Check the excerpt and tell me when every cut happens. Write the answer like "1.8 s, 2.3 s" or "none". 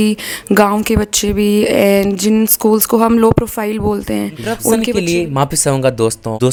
none